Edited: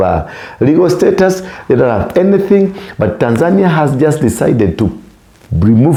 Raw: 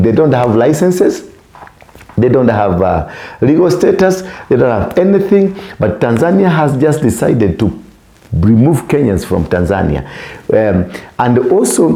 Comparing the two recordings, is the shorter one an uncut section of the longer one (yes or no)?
yes